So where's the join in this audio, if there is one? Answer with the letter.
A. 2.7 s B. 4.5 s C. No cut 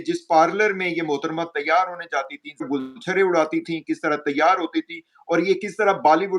A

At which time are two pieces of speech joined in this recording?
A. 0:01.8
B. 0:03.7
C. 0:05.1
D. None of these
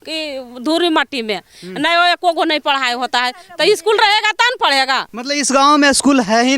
C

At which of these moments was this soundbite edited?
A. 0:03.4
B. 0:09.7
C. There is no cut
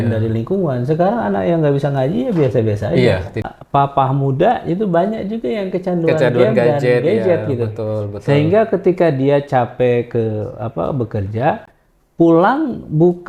A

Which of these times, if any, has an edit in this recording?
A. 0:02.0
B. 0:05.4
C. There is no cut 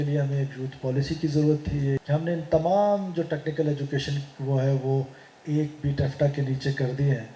A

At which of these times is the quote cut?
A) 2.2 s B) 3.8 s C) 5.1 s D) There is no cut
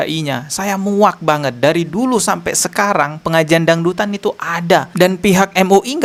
D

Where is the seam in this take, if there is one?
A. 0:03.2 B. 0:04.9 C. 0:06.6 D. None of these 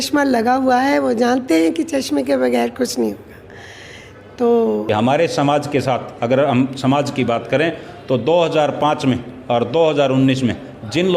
B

